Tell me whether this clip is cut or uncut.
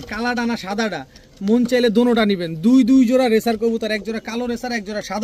uncut